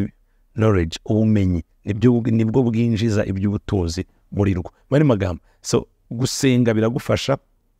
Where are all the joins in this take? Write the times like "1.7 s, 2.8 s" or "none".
none